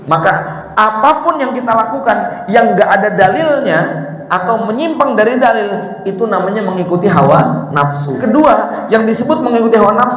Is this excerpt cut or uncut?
cut